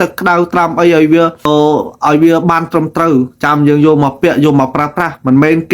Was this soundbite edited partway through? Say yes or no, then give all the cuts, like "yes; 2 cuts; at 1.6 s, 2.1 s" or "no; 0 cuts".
yes; 1 cut; at 1.4 s